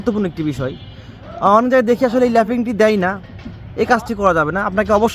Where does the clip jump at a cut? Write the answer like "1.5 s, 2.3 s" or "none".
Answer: none